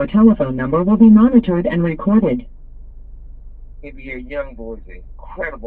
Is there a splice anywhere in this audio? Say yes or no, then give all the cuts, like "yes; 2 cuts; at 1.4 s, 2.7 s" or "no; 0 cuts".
no; 0 cuts